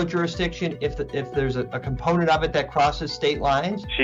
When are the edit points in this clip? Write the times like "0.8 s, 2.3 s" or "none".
none